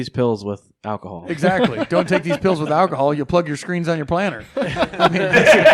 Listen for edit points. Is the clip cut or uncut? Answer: uncut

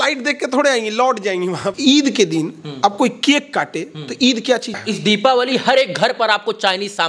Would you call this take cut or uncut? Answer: cut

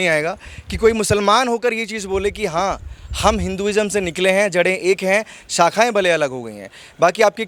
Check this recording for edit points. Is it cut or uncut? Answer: uncut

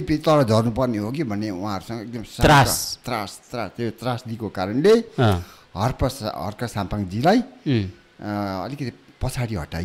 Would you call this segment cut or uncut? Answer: uncut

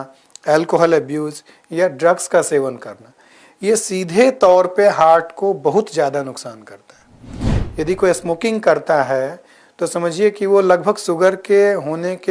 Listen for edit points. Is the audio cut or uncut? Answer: uncut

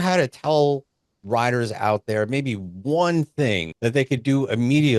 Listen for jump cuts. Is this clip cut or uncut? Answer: cut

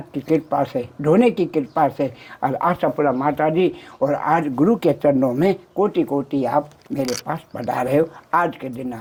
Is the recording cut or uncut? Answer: uncut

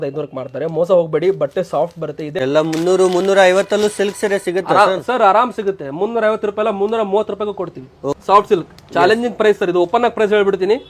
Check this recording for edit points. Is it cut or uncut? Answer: cut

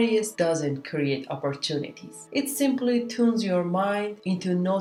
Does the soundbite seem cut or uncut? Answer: uncut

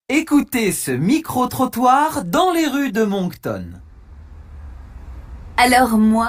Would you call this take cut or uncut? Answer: cut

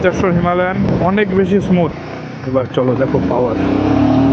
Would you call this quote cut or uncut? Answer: cut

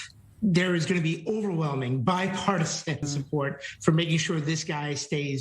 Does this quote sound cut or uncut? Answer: cut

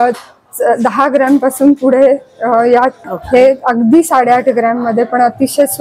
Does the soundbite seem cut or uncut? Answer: cut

